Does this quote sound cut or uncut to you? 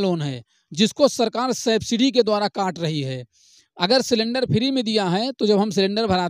uncut